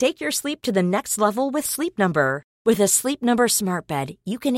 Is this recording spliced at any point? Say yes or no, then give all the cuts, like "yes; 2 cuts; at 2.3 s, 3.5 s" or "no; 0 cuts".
no; 0 cuts